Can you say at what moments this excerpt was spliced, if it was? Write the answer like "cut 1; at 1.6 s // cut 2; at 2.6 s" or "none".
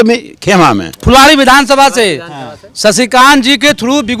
cut 1; at 0.9 s